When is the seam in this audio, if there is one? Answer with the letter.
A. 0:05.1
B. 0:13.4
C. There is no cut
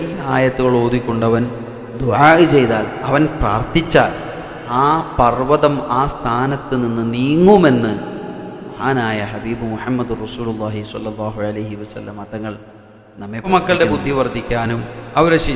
B